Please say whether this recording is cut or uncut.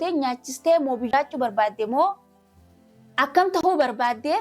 cut